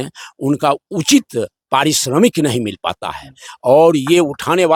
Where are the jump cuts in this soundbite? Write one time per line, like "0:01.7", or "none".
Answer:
none